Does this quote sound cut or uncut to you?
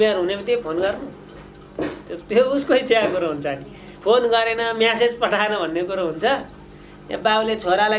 uncut